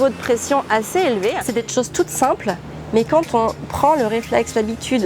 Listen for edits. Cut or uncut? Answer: cut